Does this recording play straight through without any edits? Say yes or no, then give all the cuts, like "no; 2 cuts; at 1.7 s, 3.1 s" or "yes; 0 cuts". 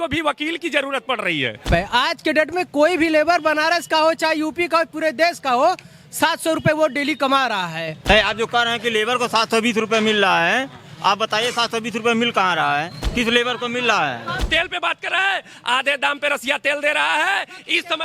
no; 3 cuts; at 1.7 s, 7.9 s, 14.5 s